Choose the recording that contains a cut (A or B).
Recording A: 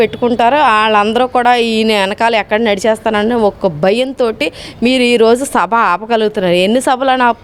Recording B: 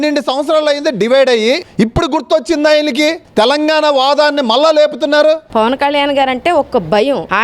B